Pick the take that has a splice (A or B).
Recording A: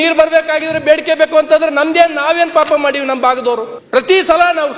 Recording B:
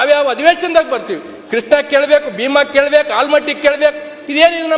A